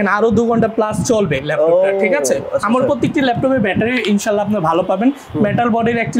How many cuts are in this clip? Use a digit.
0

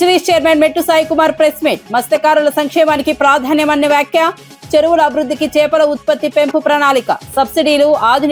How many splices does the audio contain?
0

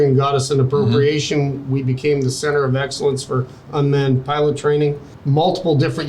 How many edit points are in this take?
1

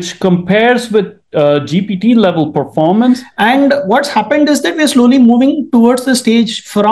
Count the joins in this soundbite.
1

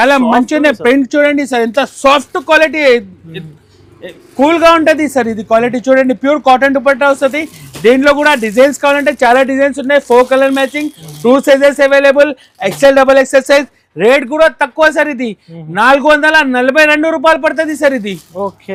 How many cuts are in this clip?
0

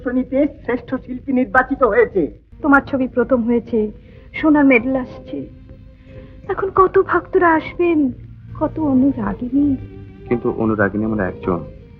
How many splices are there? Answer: 1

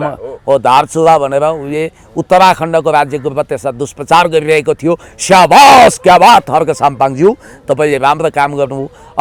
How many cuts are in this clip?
0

